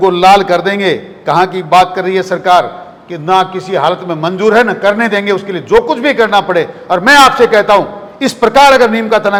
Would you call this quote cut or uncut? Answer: uncut